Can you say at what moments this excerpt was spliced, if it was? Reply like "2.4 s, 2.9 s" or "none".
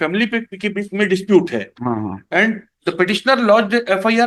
none